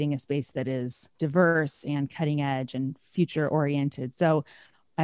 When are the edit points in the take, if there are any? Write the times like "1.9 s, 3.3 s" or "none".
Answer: 1.1 s